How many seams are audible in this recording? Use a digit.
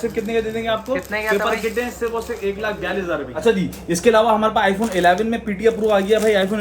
1